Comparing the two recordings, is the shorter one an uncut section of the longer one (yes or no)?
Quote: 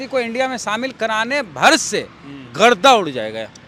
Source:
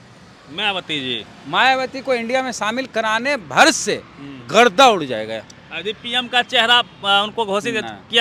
yes